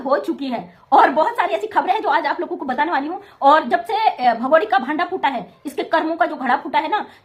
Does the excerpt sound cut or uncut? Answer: uncut